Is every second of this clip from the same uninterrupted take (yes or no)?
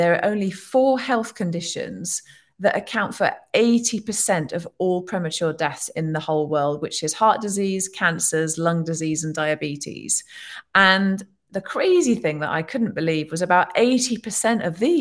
yes